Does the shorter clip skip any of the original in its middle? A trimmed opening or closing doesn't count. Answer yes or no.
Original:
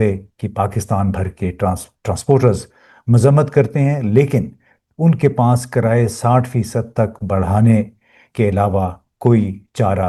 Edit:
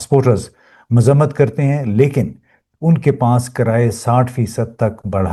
no